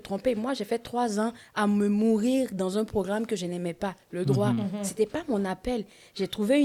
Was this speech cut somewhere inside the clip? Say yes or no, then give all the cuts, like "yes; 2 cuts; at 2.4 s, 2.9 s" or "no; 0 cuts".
no; 0 cuts